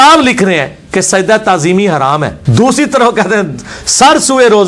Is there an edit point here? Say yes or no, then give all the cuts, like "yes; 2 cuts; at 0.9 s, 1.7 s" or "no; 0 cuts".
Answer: yes; 1 cut; at 2.4 s